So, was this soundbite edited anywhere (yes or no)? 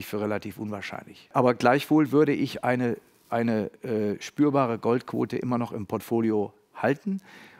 yes